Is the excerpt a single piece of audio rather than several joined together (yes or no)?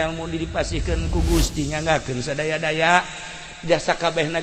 yes